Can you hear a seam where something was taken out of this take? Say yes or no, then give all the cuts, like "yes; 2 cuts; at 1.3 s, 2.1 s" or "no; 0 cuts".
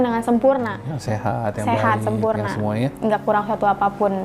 no; 0 cuts